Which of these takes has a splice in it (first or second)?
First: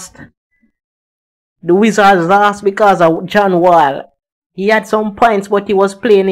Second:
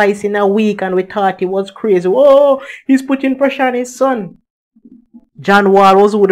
first